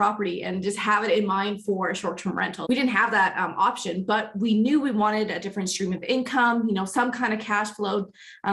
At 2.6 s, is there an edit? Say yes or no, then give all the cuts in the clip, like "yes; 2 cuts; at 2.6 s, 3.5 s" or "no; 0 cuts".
yes; 1 cut; at 2.6 s